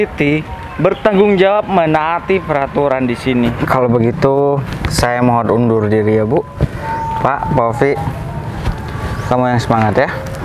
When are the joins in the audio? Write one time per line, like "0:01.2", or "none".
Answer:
0:03.6